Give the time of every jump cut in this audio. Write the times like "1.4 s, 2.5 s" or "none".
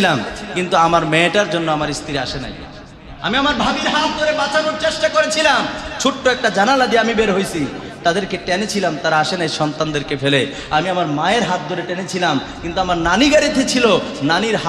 none